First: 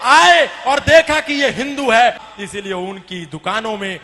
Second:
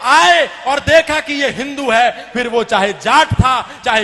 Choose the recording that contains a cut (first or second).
first